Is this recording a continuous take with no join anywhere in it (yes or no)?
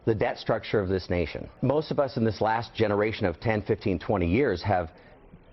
no